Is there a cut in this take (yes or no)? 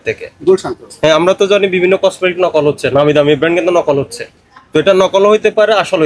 no